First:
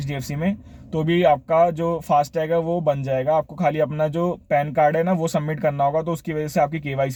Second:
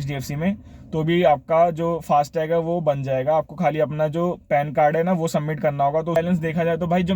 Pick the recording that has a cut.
second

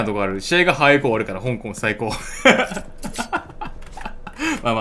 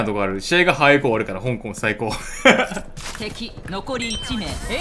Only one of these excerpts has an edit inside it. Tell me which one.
second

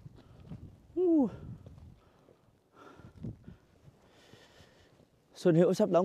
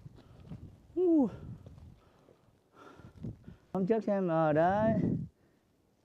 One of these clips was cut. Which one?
second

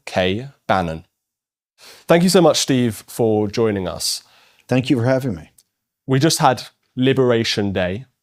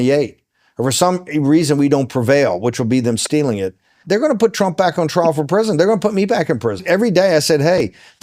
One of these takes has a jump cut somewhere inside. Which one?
second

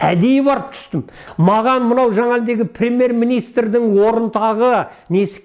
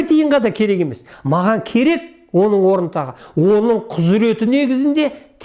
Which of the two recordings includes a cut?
first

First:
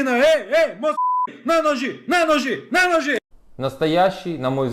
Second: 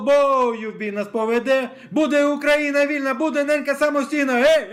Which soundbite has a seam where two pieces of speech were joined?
first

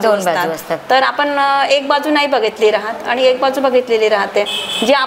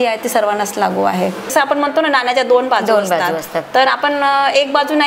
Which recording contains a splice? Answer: second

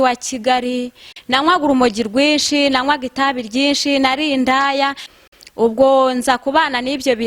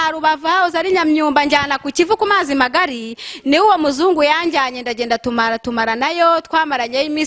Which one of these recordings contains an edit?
first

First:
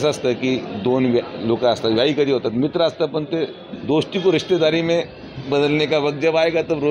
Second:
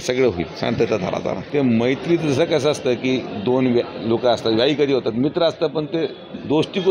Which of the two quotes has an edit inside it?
second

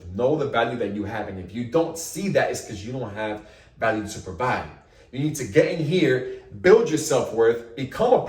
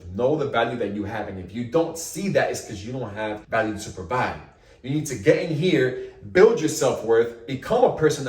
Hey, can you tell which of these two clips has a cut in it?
second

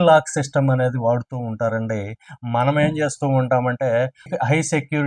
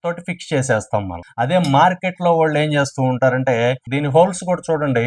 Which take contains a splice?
second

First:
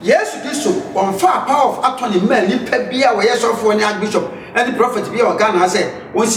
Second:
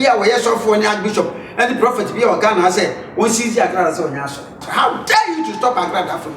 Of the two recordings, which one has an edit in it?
second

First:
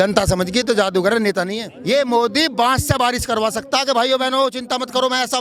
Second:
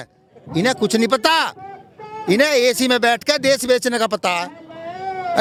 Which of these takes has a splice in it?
first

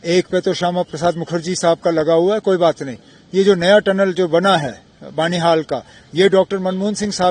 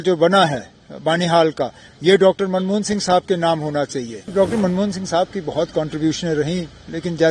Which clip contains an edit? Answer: second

